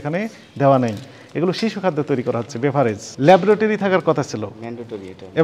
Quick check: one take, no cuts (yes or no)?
no